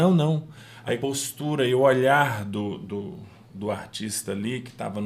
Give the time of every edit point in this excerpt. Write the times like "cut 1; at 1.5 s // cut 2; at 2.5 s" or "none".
cut 1; at 1.0 s